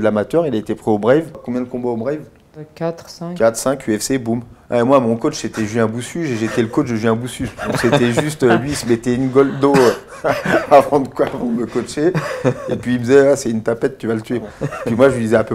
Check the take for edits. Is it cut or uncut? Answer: cut